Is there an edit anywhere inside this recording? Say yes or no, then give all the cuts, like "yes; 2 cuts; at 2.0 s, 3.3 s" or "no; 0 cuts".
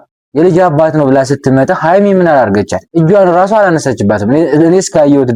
no; 0 cuts